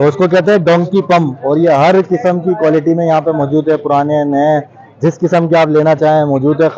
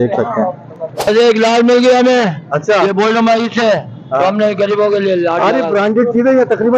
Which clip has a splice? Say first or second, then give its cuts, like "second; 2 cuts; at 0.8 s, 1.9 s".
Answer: second; 1 cut; at 1.0 s